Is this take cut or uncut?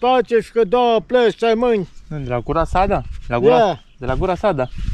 uncut